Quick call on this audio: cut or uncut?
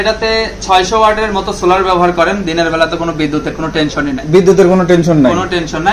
uncut